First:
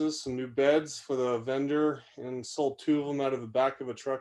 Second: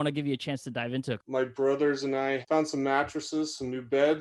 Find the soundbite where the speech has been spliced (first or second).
second